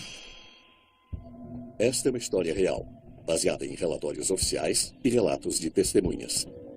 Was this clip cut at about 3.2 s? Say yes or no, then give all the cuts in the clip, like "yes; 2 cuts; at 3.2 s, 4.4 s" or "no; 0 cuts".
no; 1 cut; at 1.0 s